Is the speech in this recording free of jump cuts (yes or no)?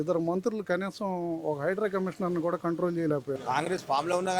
no